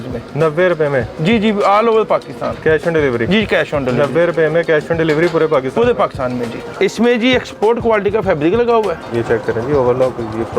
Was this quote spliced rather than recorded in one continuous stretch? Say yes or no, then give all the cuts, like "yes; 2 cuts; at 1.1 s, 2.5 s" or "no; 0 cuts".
yes; 2 cuts; at 6.6 s, 9.0 s